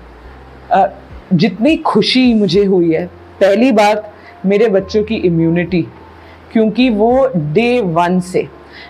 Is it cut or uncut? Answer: uncut